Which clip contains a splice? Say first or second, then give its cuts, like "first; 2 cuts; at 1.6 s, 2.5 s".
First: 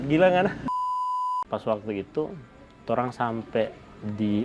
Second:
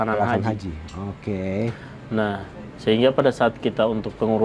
first; 1 cut; at 1.0 s